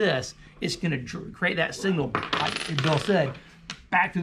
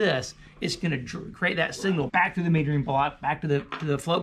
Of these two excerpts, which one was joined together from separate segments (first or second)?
second